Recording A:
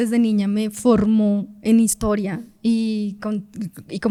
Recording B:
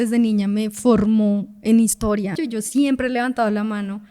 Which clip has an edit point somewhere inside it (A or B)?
B